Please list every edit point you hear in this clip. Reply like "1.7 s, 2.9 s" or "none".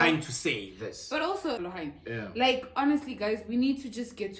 1.6 s